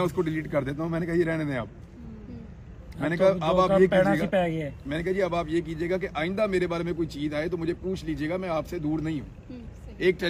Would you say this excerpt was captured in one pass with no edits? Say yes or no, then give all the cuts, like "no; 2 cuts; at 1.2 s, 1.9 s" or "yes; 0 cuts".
yes; 0 cuts